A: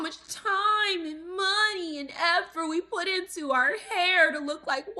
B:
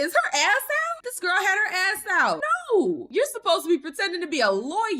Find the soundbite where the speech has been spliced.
B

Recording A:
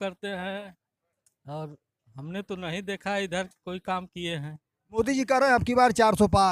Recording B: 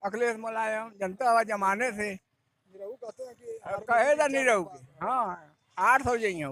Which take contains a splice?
A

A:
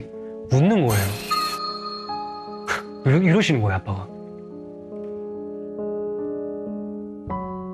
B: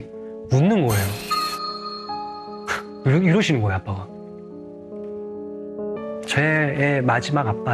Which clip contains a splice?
B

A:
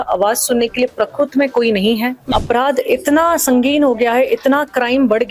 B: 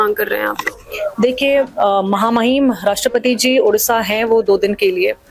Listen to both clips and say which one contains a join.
A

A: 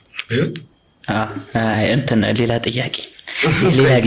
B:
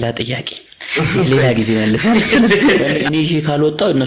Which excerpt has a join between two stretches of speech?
B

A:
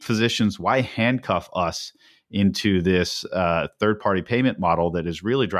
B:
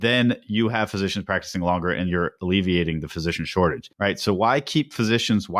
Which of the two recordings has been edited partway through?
B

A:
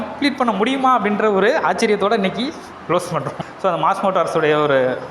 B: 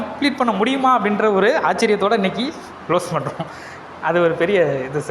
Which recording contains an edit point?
A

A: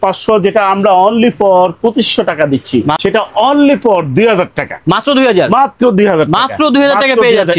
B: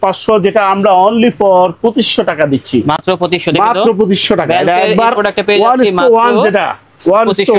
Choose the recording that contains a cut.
A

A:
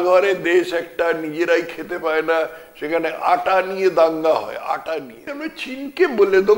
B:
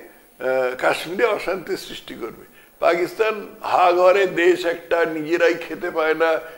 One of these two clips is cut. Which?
A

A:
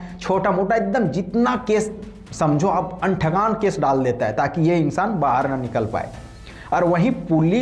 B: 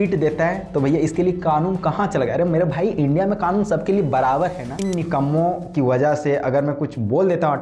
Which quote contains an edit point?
B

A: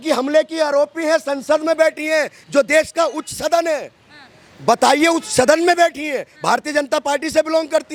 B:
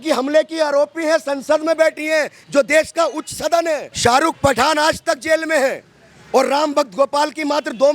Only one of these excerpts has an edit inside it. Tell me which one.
B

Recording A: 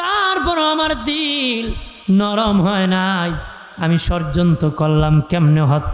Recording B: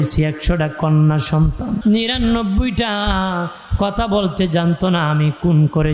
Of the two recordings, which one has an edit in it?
B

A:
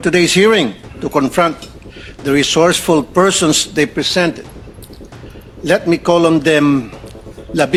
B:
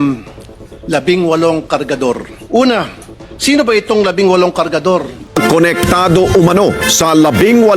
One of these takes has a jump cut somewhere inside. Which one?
B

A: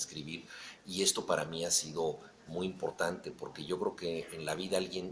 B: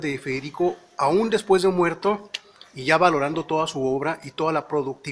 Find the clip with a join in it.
B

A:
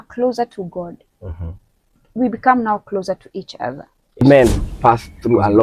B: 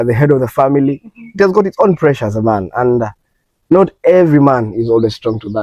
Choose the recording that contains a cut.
A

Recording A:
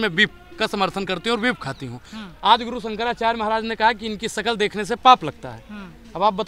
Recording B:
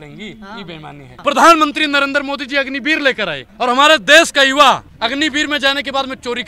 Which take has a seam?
B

